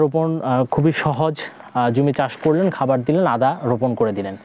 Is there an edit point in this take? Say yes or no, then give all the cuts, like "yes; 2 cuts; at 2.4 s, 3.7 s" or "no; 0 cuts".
no; 0 cuts